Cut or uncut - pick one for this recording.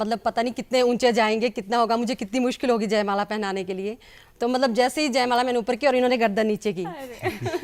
uncut